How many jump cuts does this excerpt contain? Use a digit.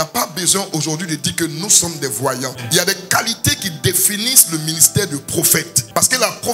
1